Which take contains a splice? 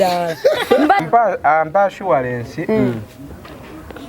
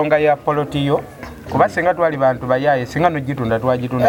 first; 1 cut; at 1.0 s

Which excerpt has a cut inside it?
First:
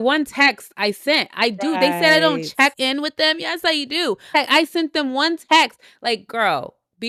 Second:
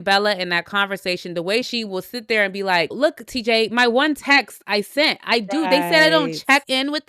second; 2 cuts; at 1.7 s, 2.9 s

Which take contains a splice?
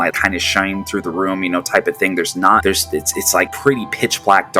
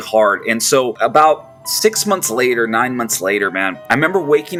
first; 1 cut; at 3.2 s

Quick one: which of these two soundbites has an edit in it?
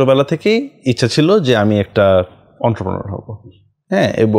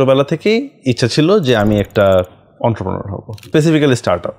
second; 1 cut; at 3.4 s

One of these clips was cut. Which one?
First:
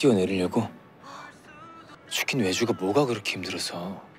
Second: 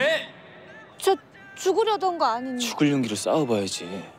first; 1 cut; at 1.9 s

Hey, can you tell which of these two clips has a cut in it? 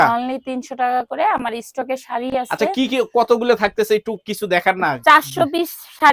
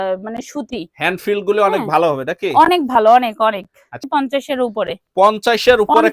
second; 1 cut; at 4.0 s

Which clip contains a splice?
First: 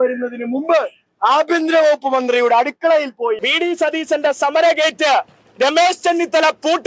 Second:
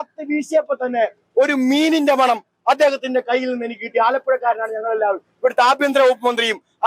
first; 1 cut; at 3.5 s

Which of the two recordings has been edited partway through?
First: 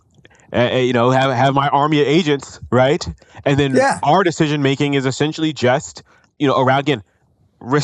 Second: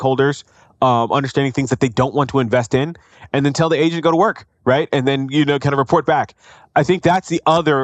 first; 1 cut; at 6.2 s

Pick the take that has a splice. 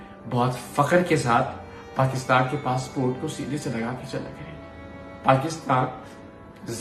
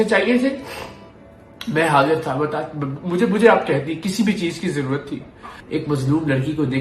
second; 1 cut; at 5.5 s

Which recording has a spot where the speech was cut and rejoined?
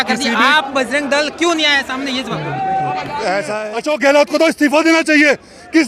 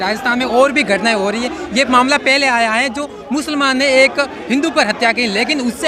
first; 1 cut; at 3.5 s

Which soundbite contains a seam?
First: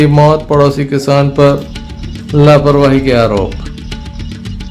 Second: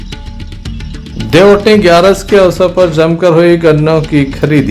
second; 1 cut; at 1.0 s

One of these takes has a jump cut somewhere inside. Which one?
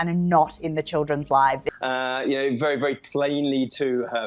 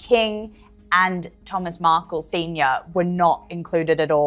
first; 1 cut; at 1.7 s

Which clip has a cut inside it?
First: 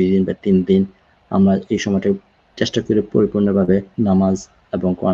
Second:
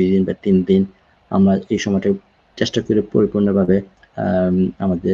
first; 1 cut; at 3.9 s

